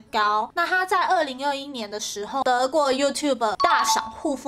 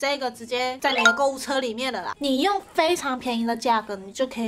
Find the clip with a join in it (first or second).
second